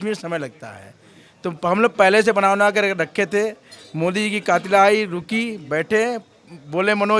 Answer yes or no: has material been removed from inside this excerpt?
no